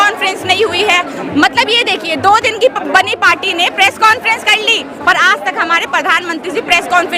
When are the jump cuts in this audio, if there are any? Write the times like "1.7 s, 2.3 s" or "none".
none